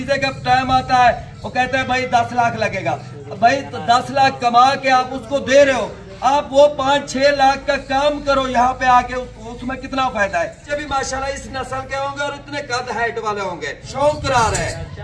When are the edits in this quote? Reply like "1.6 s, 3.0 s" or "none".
10.6 s, 13.8 s

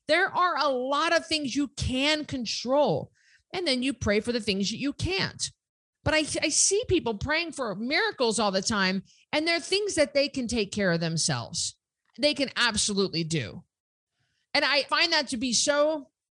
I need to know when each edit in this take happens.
12.0 s, 14.9 s

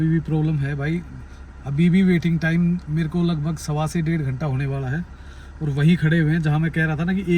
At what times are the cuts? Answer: none

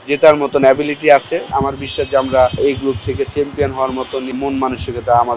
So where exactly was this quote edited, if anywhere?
1.5 s, 2.6 s, 4.4 s

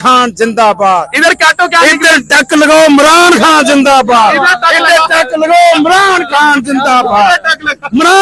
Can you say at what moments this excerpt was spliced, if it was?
none

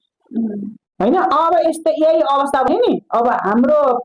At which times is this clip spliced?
none

